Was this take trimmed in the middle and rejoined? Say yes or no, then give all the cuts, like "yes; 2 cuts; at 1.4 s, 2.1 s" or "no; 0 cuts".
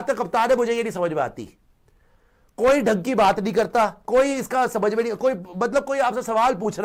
no; 0 cuts